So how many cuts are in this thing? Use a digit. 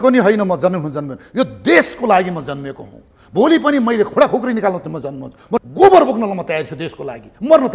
1